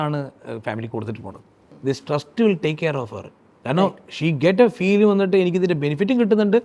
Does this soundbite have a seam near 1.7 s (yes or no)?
yes